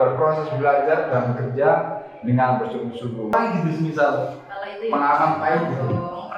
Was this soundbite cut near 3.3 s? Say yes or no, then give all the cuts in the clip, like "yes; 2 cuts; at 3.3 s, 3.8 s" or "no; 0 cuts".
yes; 1 cut; at 3.3 s